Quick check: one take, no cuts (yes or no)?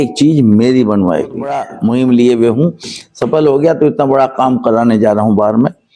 no